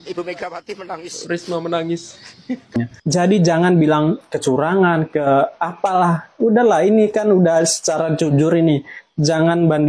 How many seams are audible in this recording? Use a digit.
2